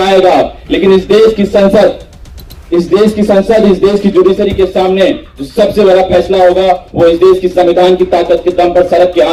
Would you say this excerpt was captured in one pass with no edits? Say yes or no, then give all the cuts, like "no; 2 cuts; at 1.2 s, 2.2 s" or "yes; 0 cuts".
yes; 0 cuts